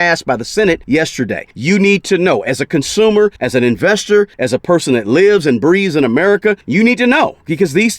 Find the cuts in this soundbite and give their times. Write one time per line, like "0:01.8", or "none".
0:01.1
0:03.4
0:04.4
0:06.6